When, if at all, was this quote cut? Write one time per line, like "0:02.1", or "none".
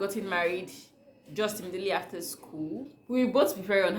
0:03.0